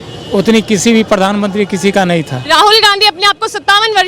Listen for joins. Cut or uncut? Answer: uncut